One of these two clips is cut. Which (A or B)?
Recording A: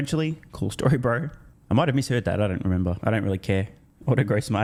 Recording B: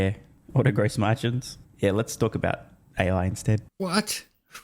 B